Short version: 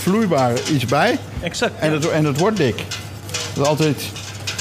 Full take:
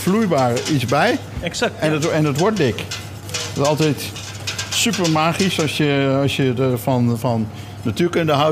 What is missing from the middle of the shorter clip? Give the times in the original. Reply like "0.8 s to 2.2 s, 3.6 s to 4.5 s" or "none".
none